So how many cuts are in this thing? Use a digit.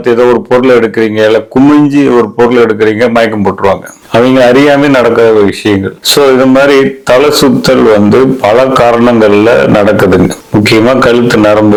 0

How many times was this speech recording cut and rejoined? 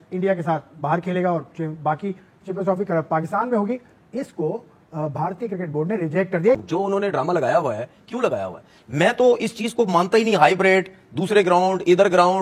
1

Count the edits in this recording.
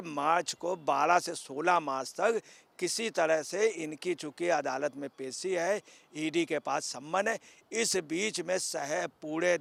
0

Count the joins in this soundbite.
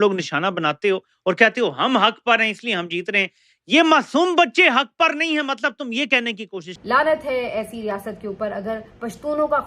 1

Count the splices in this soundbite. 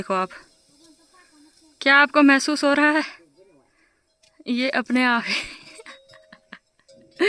0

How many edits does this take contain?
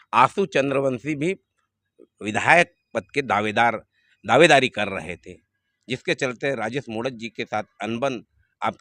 0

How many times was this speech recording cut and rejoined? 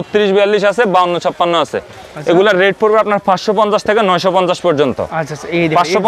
0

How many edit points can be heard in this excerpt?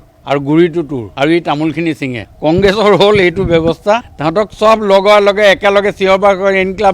2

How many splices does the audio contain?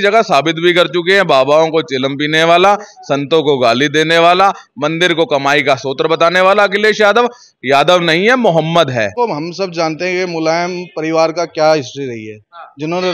1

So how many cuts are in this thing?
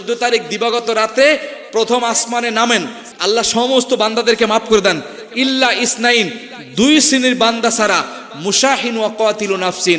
1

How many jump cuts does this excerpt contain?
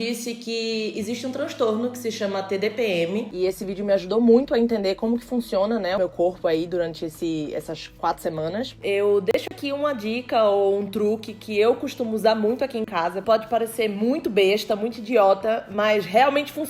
4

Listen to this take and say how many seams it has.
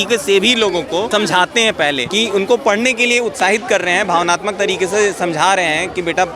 2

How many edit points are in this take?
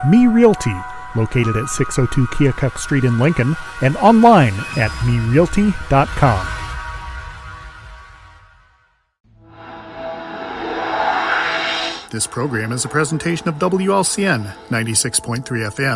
0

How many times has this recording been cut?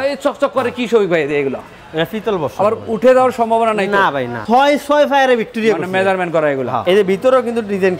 2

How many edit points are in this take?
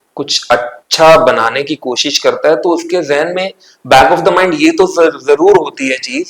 0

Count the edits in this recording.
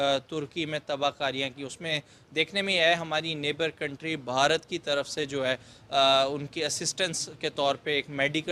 0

